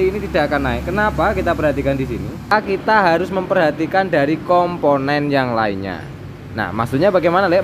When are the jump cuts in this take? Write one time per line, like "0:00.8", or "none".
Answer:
0:02.5